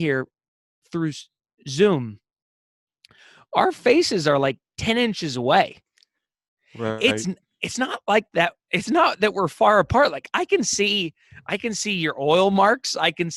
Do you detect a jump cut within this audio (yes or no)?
no